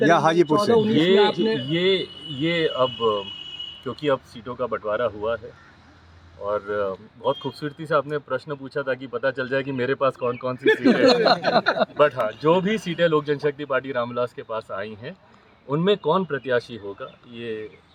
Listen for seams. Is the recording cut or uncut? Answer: uncut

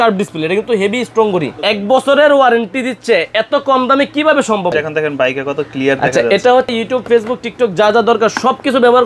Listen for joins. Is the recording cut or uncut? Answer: cut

